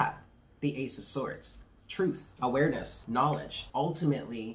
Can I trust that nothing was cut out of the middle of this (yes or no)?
no